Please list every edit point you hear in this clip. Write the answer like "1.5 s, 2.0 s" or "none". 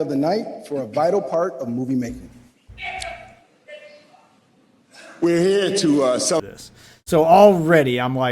6.4 s